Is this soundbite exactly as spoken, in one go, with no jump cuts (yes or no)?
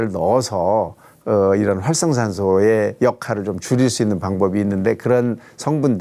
yes